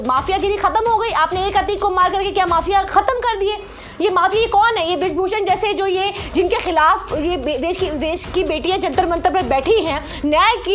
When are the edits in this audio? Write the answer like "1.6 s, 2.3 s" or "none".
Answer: none